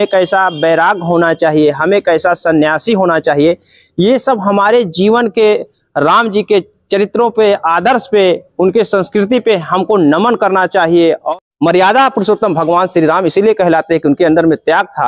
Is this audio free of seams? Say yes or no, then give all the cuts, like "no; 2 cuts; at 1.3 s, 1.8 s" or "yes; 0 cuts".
no; 1 cut; at 11.2 s